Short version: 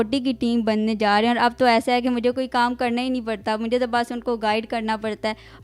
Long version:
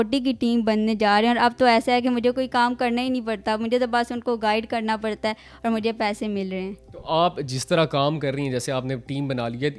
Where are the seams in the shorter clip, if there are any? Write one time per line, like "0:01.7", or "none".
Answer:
none